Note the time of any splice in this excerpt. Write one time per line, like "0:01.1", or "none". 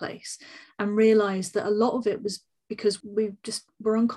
0:03.0